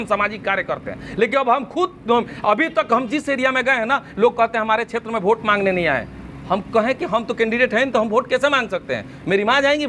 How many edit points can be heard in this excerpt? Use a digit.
0